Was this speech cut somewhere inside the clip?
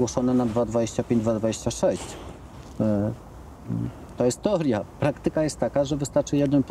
no; 0 cuts

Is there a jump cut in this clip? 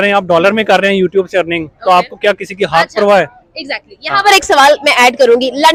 no; 0 cuts

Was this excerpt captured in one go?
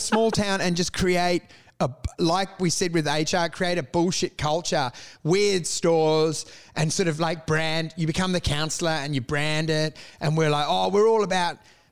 yes; 0 cuts

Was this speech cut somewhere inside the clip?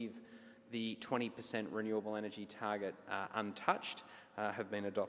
yes; 1 cut; at 1.7 s

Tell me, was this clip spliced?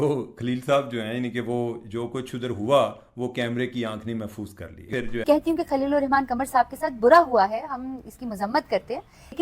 yes; 1 cut; at 5.2 s

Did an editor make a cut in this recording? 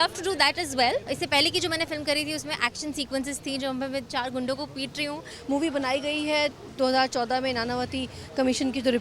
yes; 2 cuts; at 1.0 s, 5.3 s

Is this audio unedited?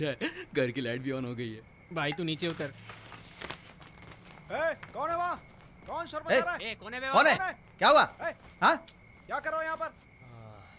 yes; 0 cuts

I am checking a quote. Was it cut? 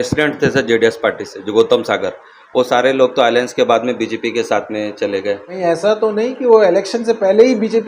yes; 1 cut; at 5.5 s

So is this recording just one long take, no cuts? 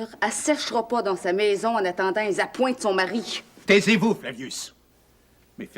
no; 1 cut; at 3.5 s

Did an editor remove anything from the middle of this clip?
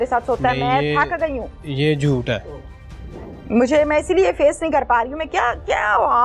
no; 0 cuts

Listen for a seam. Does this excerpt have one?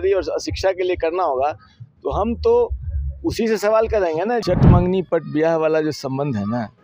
yes; 1 cut; at 4.4 s

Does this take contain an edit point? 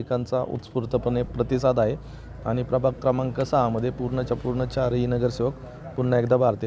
yes; 1 cut; at 1.3 s

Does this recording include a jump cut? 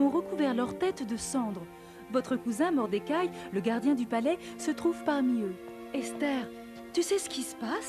no; 0 cuts

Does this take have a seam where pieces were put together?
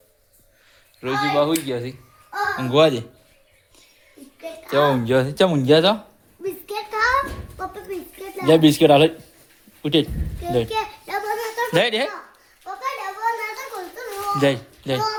no; 0 cuts

